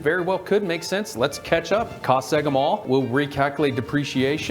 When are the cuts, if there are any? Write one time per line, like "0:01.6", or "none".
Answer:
0:02.8